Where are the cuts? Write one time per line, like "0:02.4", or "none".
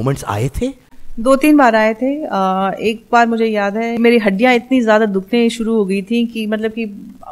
0:04.0